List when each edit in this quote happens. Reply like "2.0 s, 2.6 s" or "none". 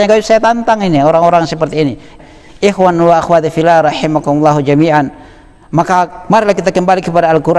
2.0 s